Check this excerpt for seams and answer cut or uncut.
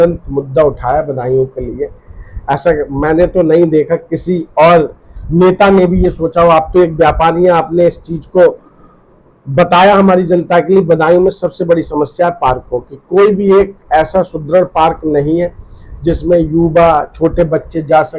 uncut